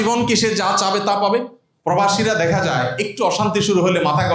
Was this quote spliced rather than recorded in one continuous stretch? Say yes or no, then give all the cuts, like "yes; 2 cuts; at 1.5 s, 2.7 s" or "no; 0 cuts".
yes; 1 cut; at 1.7 s